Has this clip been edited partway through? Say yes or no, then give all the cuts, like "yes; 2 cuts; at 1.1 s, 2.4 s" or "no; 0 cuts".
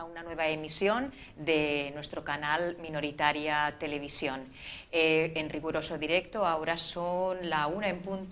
no; 0 cuts